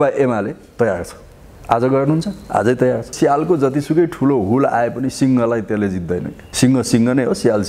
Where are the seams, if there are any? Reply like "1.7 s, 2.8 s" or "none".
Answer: 3.1 s